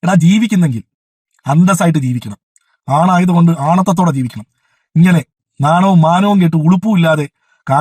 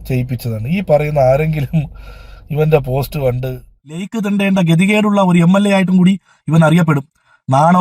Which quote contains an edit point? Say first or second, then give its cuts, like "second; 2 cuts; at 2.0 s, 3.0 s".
second; 1 cut; at 4.1 s